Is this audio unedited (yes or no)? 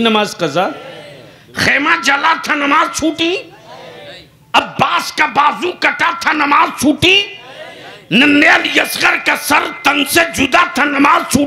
yes